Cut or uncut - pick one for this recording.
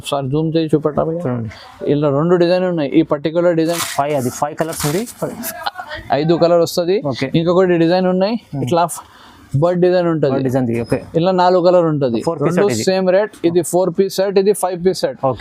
uncut